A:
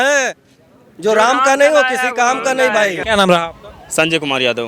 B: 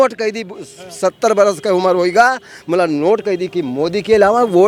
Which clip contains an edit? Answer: A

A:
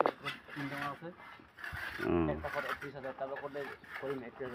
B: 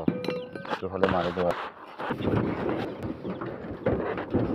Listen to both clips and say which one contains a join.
B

